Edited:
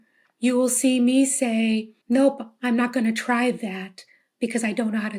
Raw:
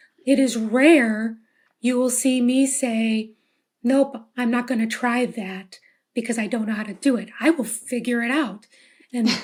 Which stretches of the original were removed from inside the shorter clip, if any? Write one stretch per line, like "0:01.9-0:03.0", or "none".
0:03.3-0:03.7